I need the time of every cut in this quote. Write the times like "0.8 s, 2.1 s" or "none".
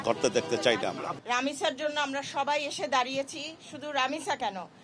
none